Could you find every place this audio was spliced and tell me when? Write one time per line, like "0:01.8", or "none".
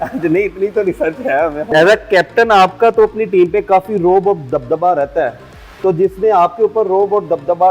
0:01.7